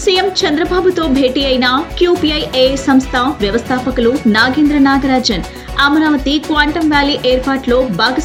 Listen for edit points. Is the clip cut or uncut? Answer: uncut